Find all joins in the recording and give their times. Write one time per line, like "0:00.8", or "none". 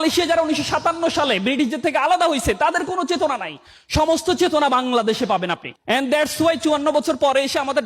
0:05.7